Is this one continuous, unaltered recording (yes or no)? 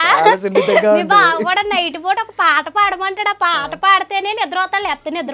yes